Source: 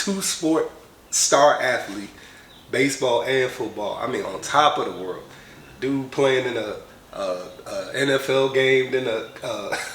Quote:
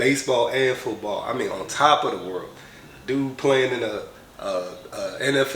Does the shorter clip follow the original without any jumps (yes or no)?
yes